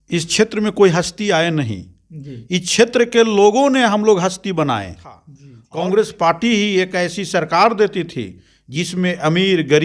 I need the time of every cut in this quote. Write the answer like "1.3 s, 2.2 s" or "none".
5.6 s